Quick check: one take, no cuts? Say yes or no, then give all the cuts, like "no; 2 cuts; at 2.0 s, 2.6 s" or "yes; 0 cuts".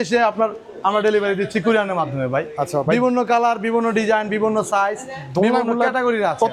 yes; 0 cuts